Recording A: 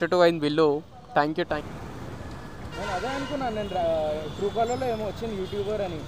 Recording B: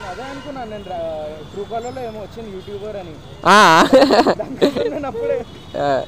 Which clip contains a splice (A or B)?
A